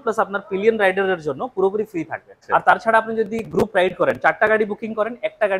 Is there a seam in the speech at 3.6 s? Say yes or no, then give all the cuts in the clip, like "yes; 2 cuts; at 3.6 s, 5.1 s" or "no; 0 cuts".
no; 1 cut; at 2.3 s